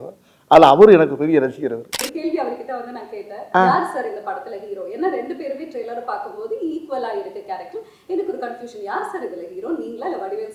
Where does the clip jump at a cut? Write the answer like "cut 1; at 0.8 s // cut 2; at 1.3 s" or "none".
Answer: cut 1; at 2.0 s